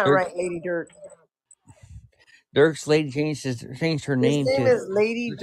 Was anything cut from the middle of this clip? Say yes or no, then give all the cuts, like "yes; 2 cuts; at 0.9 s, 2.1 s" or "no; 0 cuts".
no; 0 cuts